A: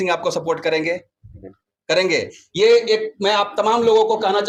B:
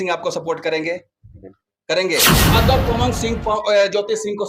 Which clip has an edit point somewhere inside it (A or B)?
B